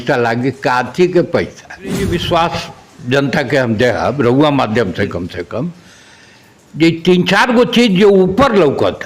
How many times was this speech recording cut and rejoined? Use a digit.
1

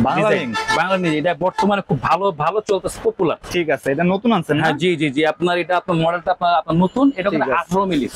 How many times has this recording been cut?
0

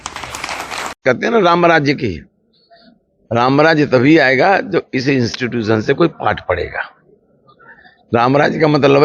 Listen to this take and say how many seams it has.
1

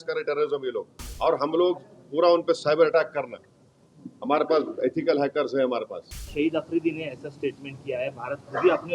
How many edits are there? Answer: 2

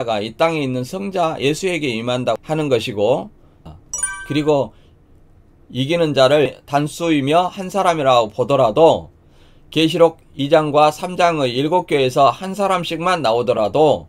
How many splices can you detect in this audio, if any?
1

